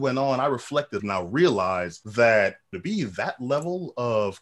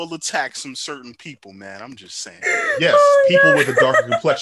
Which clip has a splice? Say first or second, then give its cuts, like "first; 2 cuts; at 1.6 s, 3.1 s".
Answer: first; 3 cuts; at 1.0 s, 2.0 s, 2.7 s